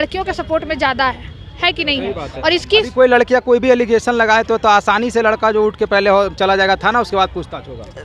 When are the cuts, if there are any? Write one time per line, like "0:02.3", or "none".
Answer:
none